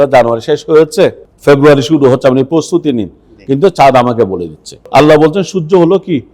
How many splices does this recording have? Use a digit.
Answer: 2